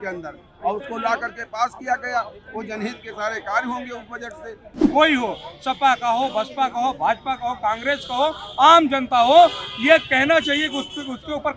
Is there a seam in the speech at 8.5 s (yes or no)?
no